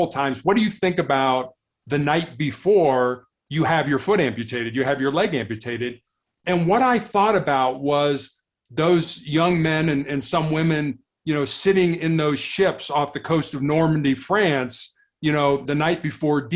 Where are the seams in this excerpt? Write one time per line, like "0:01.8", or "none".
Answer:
none